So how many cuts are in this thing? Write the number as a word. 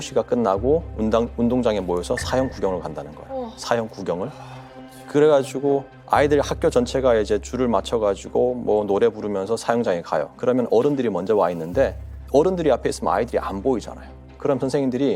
zero